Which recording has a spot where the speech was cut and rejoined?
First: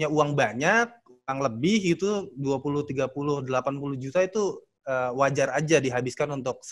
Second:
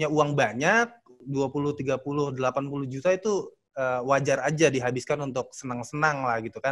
second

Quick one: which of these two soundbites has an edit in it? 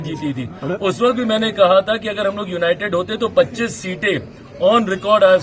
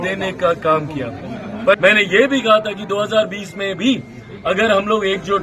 second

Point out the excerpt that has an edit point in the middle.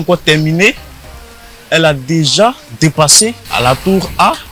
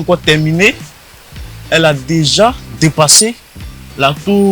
first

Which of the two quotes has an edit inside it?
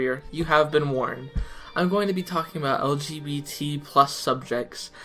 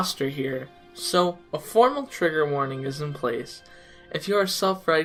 first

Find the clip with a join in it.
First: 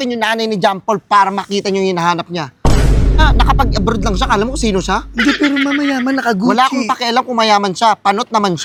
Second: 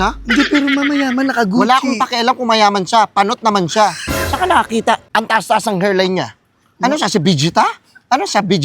second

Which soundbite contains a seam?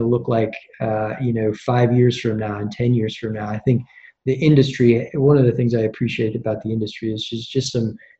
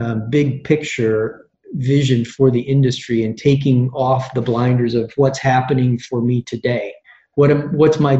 second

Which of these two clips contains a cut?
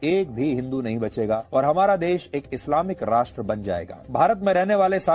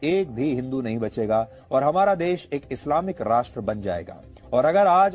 first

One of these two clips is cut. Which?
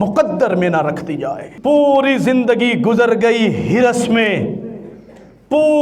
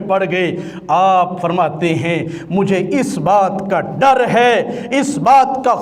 first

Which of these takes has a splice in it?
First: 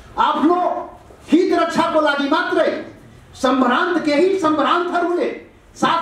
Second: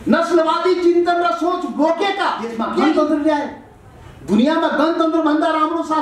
second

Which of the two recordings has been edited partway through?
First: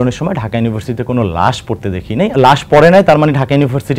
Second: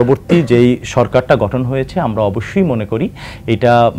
first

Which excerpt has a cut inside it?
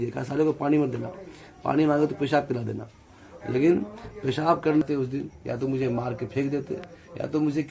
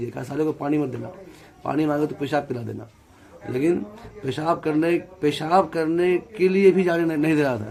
first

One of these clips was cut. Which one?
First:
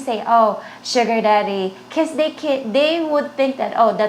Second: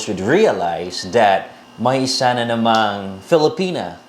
second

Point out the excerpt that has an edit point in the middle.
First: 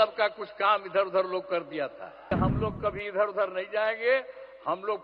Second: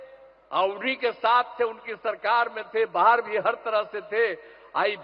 first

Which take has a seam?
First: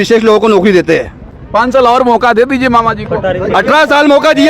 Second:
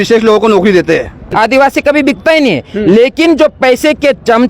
second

